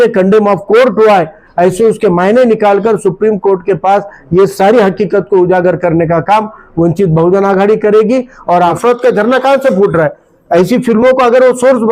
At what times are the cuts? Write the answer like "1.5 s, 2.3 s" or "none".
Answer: 8.8 s